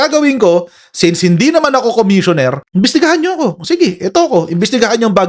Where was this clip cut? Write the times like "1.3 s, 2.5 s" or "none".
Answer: 2.6 s